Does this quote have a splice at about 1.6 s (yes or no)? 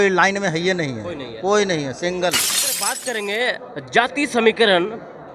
no